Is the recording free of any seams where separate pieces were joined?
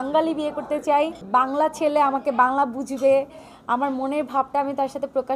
no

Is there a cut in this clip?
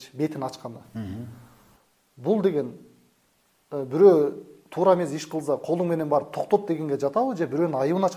no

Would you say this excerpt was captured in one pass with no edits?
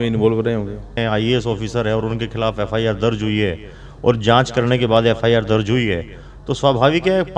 no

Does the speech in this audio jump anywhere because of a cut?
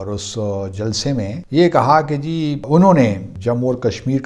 yes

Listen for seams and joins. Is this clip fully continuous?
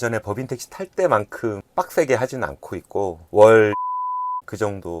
no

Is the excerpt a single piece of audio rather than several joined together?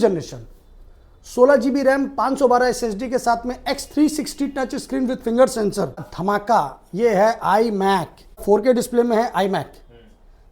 no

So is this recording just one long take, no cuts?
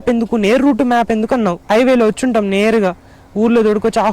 no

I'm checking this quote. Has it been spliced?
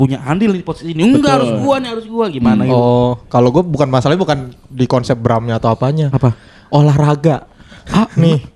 no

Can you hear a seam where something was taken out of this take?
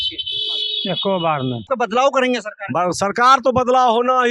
yes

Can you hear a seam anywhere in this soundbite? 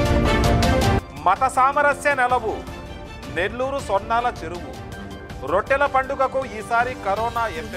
yes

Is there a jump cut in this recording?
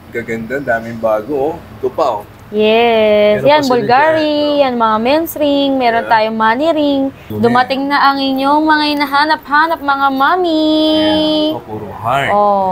yes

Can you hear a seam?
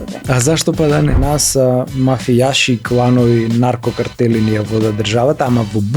yes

